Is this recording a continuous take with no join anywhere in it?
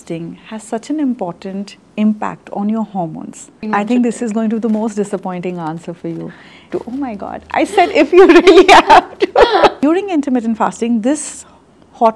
no; 3 cuts; at 3.6 s, 6.7 s, 9.8 s

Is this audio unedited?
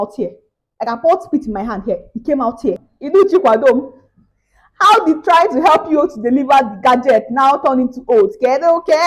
no; 1 cut; at 2.9 s

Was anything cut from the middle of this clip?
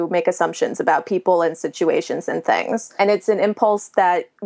yes; 1 cut; at 2.9 s

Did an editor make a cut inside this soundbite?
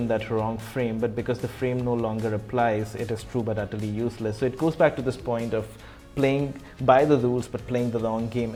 no; 0 cuts

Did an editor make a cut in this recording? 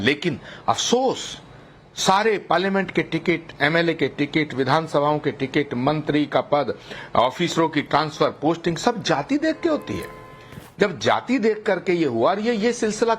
yes; 1 cut; at 1.0 s

